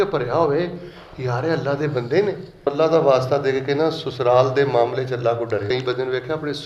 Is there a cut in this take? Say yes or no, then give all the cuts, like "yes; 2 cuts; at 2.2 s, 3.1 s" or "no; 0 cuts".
yes; 2 cuts; at 2.7 s, 5.7 s